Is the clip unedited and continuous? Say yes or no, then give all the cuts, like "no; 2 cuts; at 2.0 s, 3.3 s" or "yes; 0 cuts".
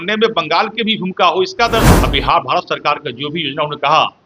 no; 1 cut; at 1.9 s